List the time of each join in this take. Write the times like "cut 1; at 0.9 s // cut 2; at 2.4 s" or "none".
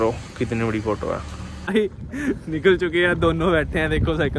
cut 1; at 1.6 s

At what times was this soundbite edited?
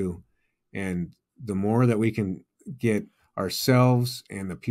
none

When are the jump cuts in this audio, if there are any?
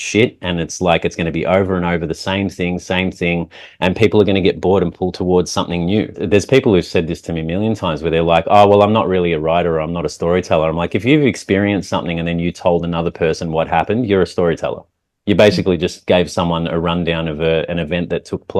cut 1; at 6.2 s

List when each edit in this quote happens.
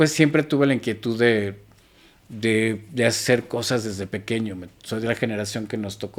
none

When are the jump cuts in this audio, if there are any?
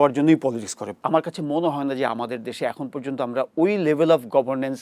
cut 1; at 1.0 s

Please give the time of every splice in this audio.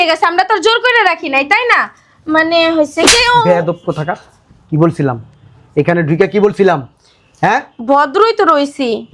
none

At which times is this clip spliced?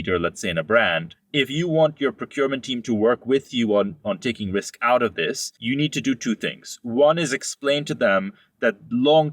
cut 1; at 1.1 s // cut 2; at 5.5 s

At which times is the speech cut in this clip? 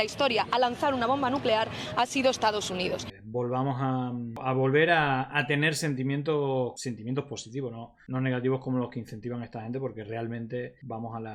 cut 1; at 3.1 s // cut 2; at 4.4 s // cut 3; at 6.8 s

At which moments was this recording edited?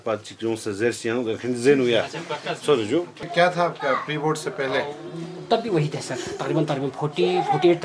cut 1; at 3.3 s

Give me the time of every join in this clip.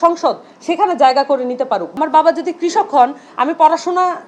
cut 1; at 1.9 s

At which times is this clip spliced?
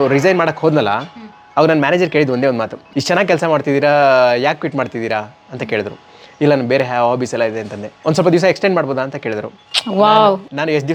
none

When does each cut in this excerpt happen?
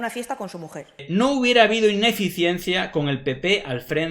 cut 1; at 1.0 s

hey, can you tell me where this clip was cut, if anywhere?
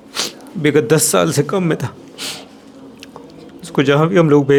none

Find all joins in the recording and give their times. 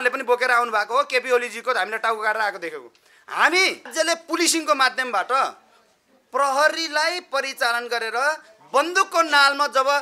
cut 1; at 3.9 s

